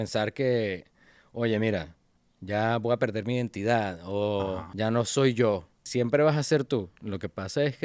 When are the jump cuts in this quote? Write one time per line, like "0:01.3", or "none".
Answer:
0:04.7
0:05.8